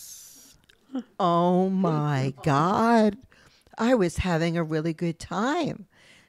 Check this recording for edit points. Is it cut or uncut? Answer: cut